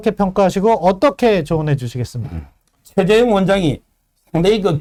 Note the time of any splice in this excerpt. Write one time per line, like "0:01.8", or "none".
none